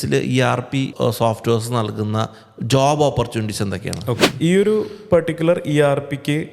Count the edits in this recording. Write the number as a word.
two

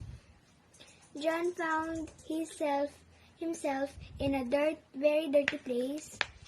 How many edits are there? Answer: one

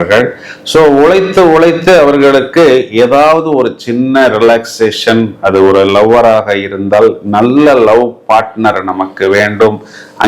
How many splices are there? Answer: zero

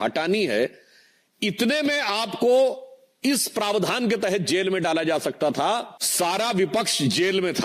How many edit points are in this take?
one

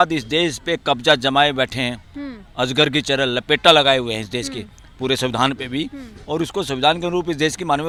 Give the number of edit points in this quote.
zero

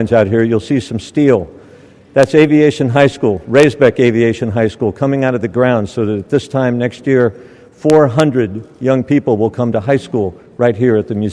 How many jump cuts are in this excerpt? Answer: zero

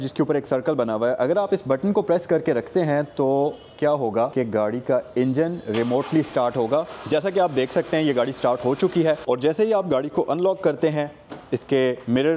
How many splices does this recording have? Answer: one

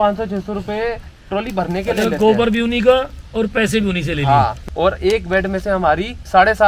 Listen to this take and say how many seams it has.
one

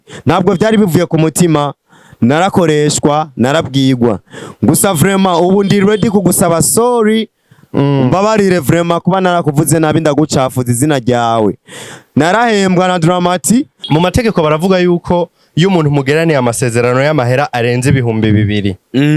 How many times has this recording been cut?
one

